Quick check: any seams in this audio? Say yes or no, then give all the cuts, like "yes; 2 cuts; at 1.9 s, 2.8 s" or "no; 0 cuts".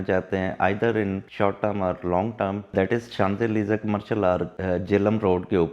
yes; 3 cuts; at 1.3 s, 2.7 s, 4.5 s